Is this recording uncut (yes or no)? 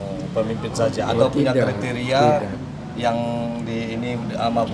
yes